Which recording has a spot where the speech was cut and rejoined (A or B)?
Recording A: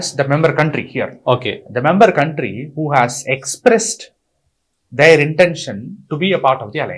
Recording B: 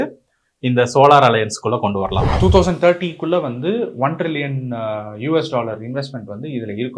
B